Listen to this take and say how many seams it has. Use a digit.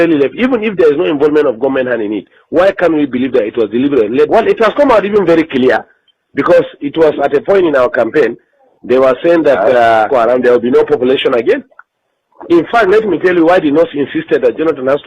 2